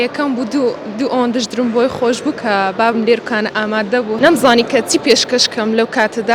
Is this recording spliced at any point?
yes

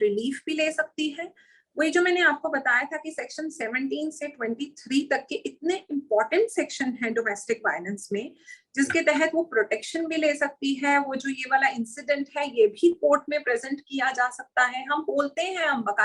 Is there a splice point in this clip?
no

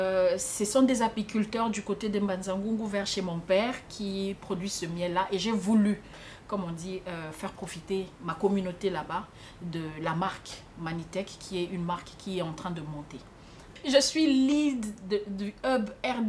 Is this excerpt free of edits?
no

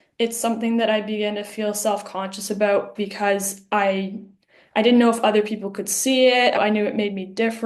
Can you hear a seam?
yes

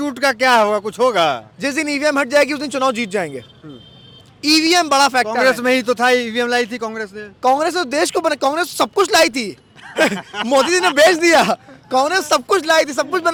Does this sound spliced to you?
no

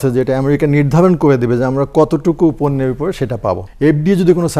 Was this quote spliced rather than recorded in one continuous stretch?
yes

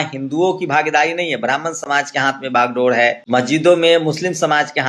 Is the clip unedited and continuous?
no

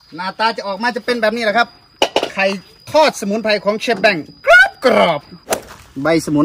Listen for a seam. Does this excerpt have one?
yes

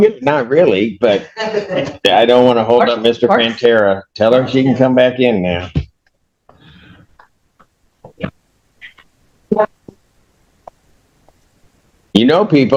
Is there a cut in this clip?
no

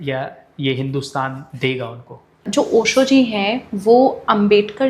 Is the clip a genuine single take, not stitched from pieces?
no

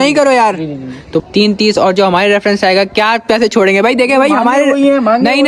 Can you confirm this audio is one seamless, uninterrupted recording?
no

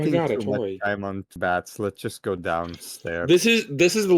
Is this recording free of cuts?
no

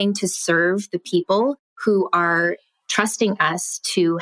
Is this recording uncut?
no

